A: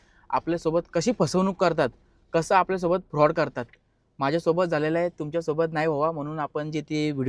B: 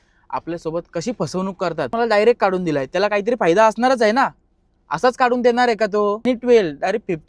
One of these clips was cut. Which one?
B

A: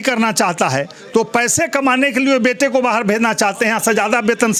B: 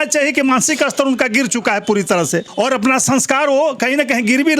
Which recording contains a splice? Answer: B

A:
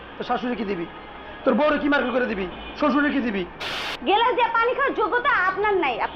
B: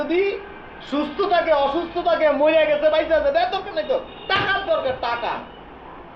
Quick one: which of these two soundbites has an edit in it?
A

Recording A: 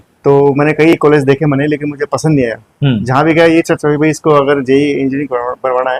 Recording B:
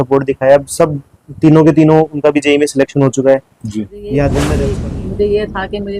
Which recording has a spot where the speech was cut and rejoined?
B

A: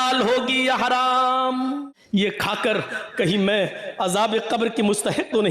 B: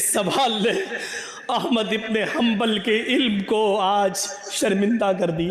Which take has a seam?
A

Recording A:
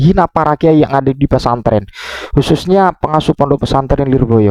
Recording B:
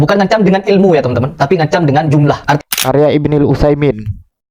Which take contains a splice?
B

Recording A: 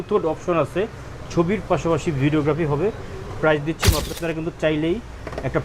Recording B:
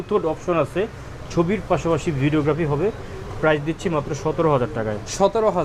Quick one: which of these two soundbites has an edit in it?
A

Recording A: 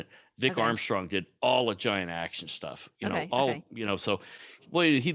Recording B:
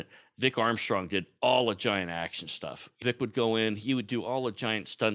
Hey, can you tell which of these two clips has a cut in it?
B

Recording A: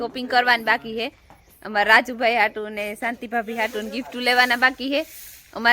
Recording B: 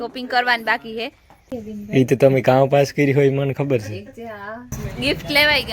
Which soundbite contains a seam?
B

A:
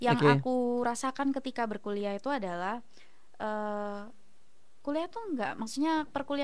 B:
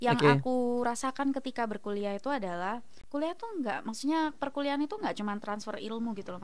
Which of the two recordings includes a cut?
B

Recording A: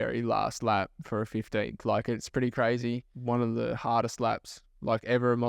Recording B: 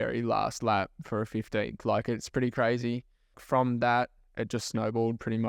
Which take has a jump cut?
A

